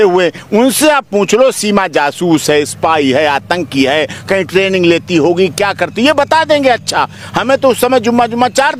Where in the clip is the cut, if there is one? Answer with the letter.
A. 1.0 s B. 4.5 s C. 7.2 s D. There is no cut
D